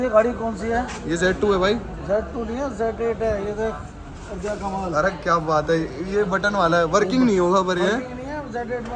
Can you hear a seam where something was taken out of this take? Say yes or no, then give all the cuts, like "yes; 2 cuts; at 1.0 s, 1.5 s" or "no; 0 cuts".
no; 0 cuts